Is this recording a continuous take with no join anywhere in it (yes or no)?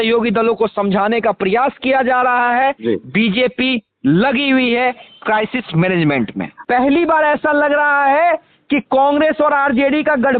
no